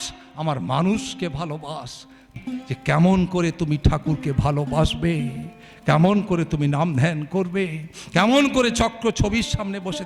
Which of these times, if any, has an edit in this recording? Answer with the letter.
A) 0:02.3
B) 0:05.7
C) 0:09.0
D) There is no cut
A